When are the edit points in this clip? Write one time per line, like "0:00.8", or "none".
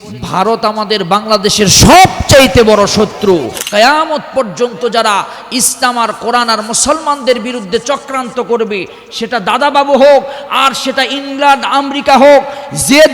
0:03.6